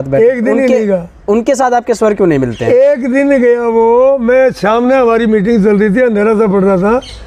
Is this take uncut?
yes; 0 cuts

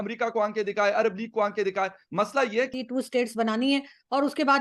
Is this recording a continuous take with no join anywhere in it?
no; 1 cut; at 2.8 s

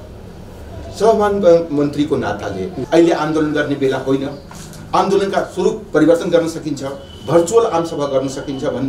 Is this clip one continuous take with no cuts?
no; 1 cut; at 2.7 s

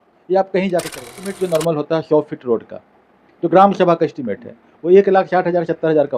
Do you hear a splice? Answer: yes; 1 cut; at 1.4 s

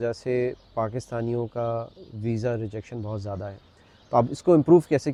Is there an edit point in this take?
no; 0 cuts

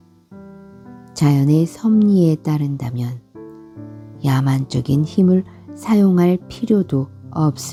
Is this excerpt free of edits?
yes; 0 cuts

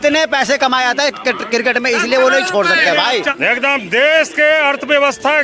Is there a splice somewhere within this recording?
yes; 1 cut; at 3.3 s

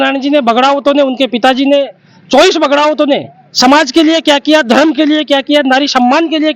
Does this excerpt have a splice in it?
no; 0 cuts

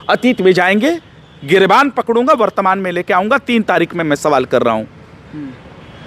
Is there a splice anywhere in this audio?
no; 0 cuts

